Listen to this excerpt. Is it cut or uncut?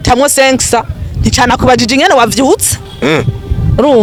uncut